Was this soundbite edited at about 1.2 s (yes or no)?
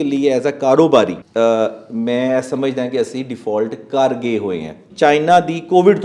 yes